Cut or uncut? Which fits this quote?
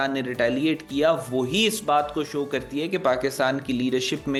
uncut